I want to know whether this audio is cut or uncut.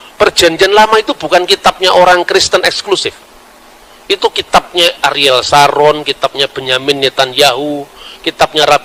uncut